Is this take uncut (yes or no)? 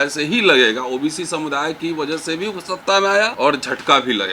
no